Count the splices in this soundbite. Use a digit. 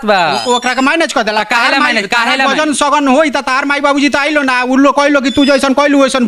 0